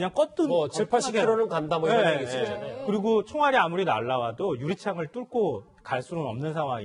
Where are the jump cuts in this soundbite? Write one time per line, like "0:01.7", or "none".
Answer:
0:03.0